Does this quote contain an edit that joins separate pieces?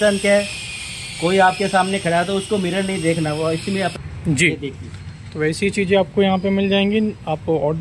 yes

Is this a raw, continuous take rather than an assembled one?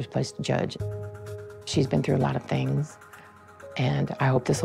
yes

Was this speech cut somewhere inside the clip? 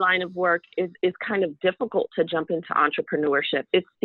no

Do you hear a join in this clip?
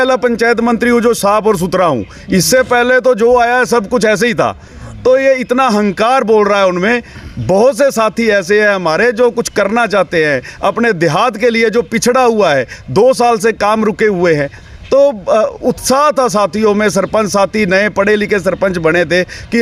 no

